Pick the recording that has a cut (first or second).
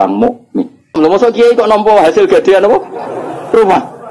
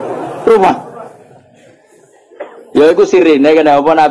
first